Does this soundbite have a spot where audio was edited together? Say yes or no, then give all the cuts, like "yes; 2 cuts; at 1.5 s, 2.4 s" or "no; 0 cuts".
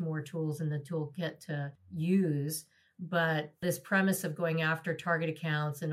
yes; 1 cut; at 1.8 s